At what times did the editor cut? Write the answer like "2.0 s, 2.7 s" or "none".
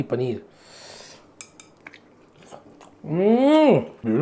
none